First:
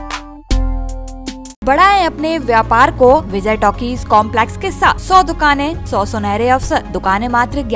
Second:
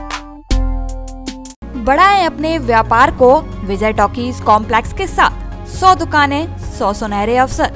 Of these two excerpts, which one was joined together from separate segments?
first; 5 cuts; at 1.6 s, 3.3 s, 5.0 s, 5.8 s, 6.9 s

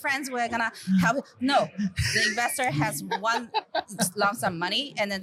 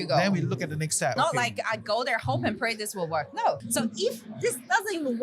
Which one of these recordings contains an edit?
second; 2 cuts; at 1.1 s, 3.6 s

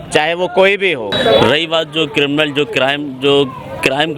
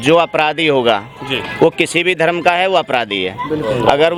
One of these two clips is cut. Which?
first; 1 cut; at 1.1 s

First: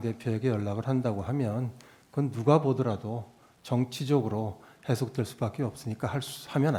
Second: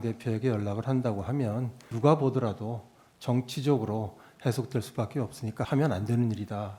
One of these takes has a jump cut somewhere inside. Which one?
second; 2 cuts; at 1.9 s, 5.7 s

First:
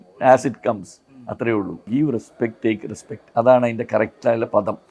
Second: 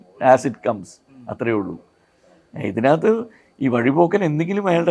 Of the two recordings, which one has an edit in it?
first; 1 cut; at 1.8 s

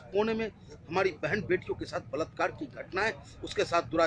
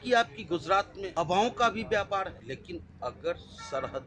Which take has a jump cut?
second; 2 cuts; at 1.0 s, 2.4 s

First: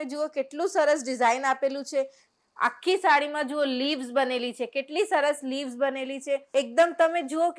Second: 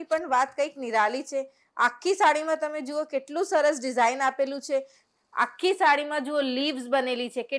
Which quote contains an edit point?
first; 1 cut; at 6.4 s

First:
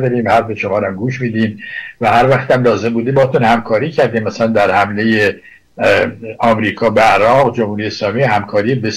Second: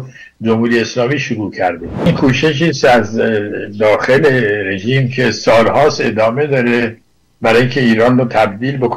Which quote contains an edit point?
second; 1 cut; at 2.1 s

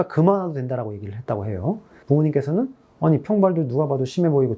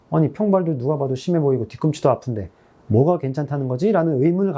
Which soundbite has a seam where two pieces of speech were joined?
first; 1 cut; at 1.9 s

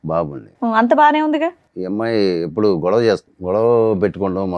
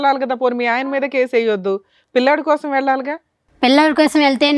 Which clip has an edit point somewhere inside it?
first; 2 cuts; at 1.7 s, 3.3 s

